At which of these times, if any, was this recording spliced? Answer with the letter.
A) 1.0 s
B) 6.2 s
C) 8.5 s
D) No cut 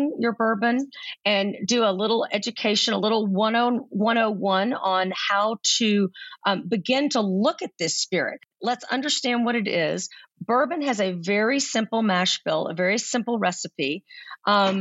C